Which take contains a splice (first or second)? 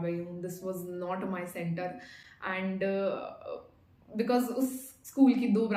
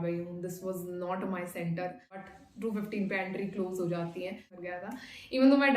second